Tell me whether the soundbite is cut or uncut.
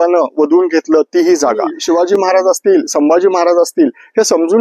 cut